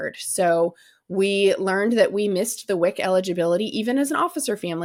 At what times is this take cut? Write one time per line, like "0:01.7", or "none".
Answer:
none